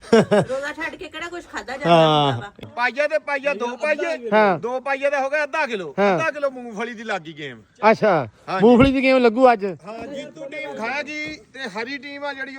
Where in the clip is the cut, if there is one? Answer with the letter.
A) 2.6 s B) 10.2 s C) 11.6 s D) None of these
A